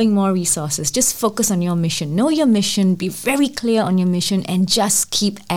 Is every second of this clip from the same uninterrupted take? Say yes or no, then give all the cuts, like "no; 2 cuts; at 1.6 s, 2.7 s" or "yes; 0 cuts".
yes; 0 cuts